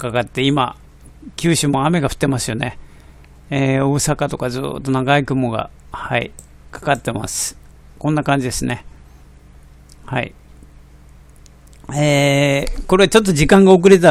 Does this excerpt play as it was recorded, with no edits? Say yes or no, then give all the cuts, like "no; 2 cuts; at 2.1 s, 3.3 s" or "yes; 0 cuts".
no; 1 cut; at 10.8 s